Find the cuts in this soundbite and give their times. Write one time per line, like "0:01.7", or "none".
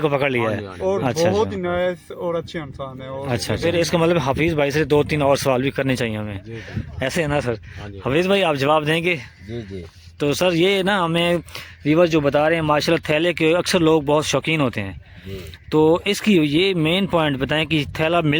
0:03.6